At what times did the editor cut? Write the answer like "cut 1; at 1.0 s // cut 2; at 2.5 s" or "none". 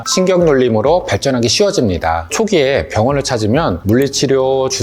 cut 1; at 2.3 s